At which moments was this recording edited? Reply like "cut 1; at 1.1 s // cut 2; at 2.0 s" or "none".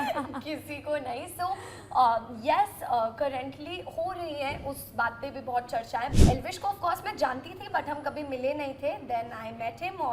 cut 1; at 6.1 s